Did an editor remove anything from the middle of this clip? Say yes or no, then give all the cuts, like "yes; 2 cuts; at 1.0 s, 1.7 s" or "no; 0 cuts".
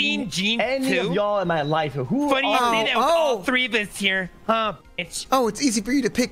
no; 0 cuts